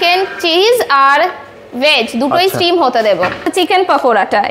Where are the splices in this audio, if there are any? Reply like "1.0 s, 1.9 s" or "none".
3.5 s